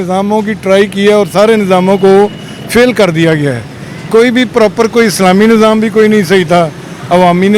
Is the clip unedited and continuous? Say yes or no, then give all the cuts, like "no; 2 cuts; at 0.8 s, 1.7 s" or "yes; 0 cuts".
yes; 0 cuts